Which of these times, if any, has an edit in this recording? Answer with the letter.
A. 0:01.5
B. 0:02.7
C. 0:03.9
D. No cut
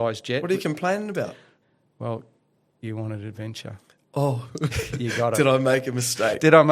A